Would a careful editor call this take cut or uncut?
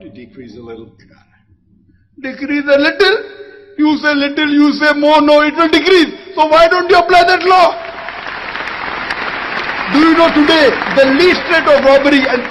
uncut